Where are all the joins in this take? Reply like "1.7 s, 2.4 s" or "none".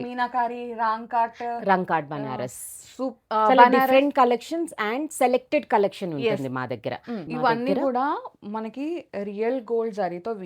7.2 s